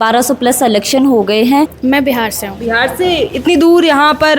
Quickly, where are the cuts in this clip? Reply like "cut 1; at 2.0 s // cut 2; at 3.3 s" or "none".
cut 1; at 1.8 s